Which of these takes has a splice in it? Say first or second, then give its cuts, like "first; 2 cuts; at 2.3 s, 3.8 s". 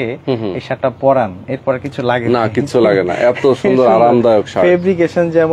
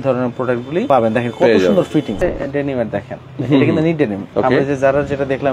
second; 3 cuts; at 0.8 s, 2.1 s, 4.2 s